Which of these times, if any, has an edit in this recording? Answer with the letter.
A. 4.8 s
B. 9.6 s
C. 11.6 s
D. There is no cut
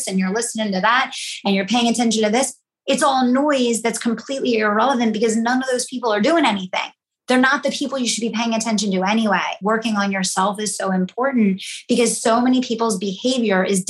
B